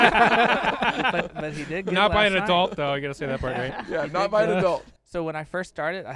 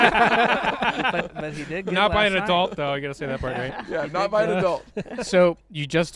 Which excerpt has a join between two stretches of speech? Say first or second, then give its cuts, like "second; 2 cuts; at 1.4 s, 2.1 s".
first; 1 cut; at 5.0 s